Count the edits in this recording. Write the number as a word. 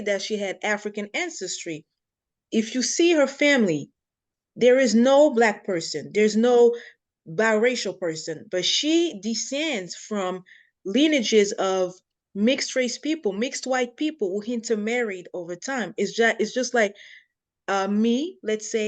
zero